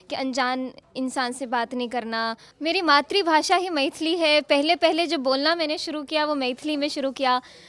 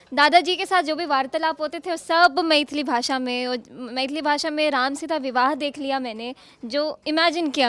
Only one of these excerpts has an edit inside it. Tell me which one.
first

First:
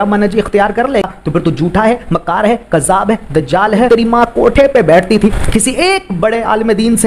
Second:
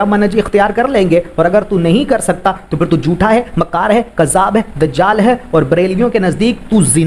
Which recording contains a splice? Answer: first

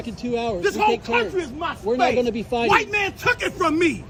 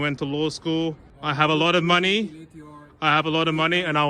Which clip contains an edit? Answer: second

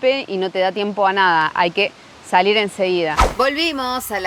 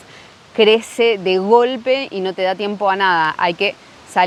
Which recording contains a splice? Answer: first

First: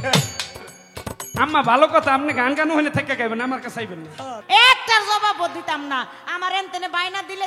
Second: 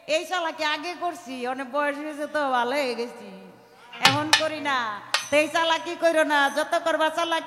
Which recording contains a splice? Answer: first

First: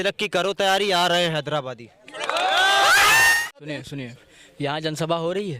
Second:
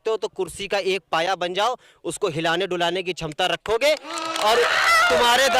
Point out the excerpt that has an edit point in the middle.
first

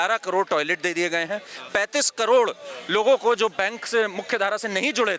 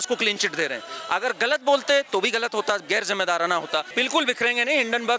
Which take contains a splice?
second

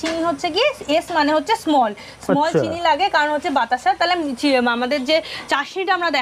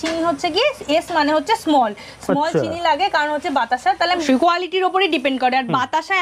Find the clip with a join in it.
second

